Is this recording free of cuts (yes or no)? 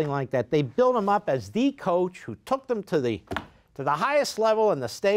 yes